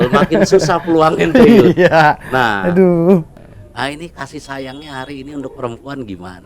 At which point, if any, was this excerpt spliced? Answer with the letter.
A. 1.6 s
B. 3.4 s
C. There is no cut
B